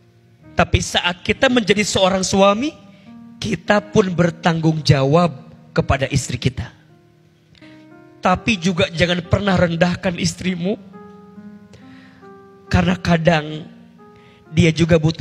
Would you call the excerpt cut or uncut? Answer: cut